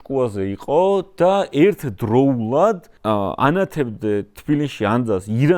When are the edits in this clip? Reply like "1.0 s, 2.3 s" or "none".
2.9 s